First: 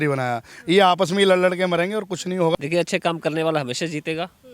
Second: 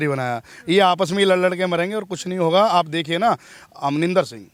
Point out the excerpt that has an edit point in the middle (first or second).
first